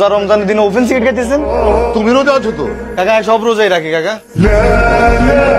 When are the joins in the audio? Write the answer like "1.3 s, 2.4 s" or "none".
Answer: none